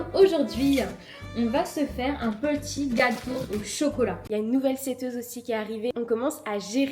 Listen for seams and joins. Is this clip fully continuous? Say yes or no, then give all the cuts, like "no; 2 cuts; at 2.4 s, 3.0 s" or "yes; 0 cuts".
no; 2 cuts; at 4.2 s, 5.9 s